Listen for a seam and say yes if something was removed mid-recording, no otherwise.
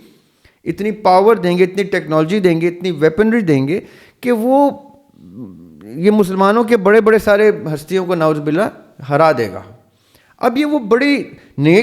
no